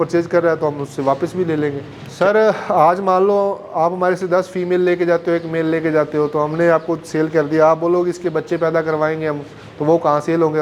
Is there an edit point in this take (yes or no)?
yes